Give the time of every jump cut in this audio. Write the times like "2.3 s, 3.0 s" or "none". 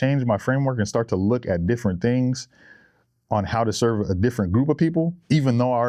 none